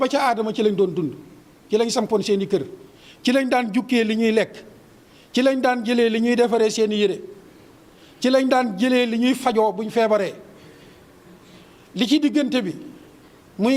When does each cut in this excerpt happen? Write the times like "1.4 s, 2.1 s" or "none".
none